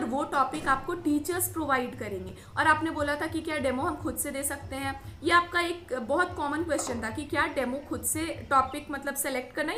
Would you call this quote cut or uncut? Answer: uncut